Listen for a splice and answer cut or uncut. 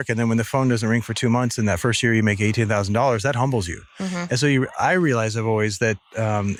uncut